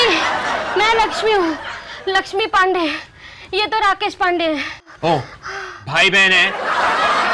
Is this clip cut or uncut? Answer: cut